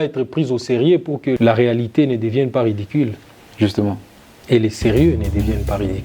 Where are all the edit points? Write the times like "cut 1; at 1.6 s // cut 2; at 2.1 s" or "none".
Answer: cut 1; at 1.4 s